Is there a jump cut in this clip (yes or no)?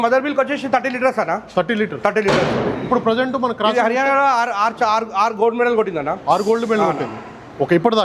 no